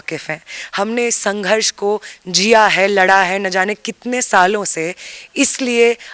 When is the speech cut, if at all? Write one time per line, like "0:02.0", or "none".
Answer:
none